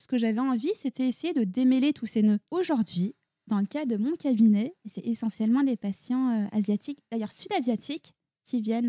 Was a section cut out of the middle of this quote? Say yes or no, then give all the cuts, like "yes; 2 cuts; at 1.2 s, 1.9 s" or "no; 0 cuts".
yes; 2 cuts; at 2.5 s, 5.0 s